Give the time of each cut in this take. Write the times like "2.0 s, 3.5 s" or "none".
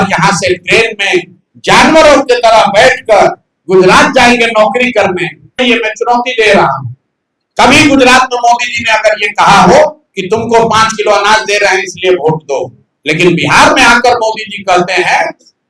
5.6 s

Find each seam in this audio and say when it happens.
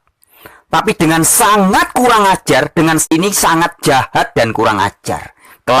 3.1 s

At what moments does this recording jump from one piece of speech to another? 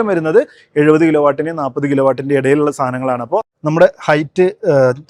3.5 s

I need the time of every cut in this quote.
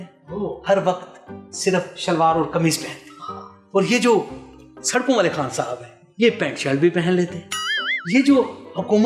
none

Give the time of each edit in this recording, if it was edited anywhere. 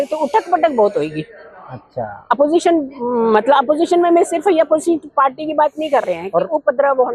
none

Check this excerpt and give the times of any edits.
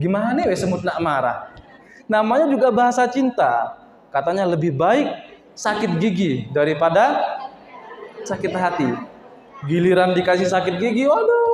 1.9 s

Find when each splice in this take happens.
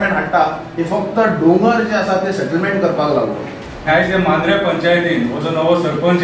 3.9 s

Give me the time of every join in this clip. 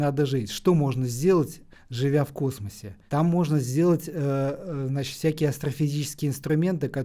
none

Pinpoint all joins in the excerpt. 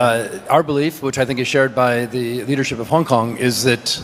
none

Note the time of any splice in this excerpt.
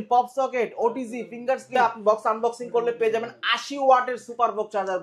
1.7 s

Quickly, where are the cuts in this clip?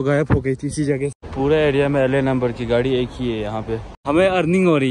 1.2 s, 3.9 s

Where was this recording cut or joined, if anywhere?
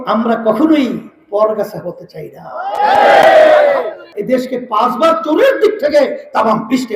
4.1 s

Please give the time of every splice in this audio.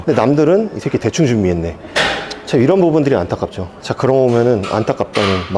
none

